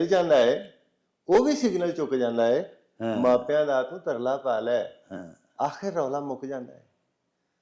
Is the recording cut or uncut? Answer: uncut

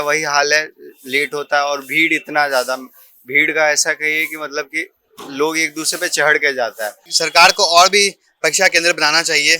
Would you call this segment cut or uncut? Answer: cut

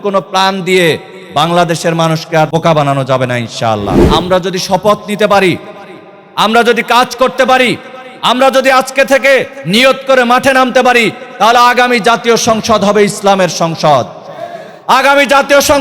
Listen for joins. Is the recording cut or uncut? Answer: cut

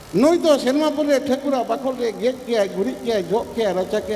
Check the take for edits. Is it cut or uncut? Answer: uncut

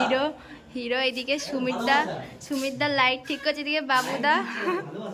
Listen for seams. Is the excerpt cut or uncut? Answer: uncut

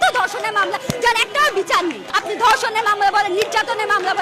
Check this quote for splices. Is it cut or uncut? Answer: cut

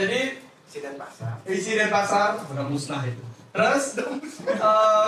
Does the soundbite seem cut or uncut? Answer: uncut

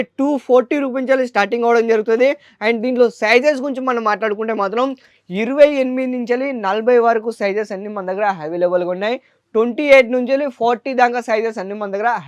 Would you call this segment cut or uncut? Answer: uncut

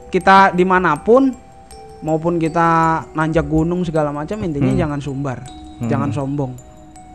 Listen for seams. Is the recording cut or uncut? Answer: uncut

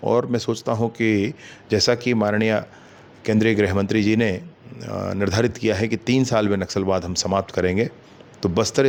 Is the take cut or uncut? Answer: uncut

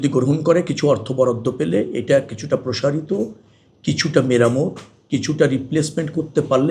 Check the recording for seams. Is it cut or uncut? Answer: uncut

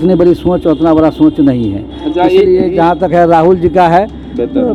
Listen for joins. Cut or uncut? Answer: uncut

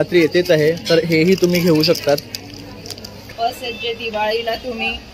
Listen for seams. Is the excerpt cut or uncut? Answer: cut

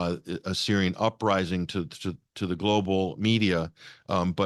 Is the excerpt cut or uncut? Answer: uncut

